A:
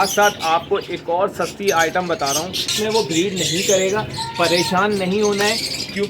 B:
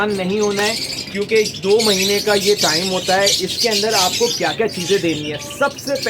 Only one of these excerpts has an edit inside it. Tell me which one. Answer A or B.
A